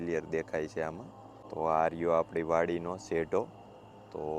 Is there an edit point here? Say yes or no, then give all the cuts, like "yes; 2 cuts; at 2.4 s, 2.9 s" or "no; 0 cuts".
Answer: no; 0 cuts